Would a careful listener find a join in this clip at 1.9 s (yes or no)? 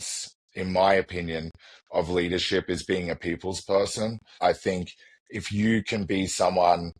no